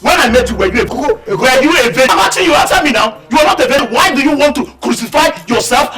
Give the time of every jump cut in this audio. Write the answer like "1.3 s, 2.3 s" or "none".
0.9 s, 2.1 s, 3.8 s